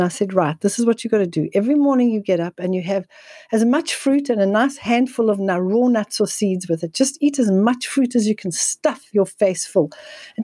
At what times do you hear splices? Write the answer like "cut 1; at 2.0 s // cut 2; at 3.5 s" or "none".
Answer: none